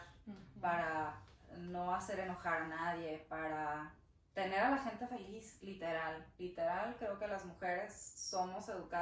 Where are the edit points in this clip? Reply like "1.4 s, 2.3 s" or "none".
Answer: none